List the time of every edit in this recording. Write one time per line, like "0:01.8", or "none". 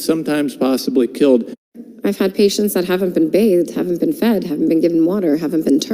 0:01.5